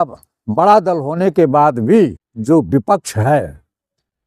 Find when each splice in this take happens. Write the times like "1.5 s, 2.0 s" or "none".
2.3 s